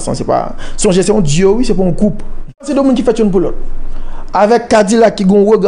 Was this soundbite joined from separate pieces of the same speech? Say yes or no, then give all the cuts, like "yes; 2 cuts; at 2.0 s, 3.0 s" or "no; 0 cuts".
yes; 1 cut; at 2.7 s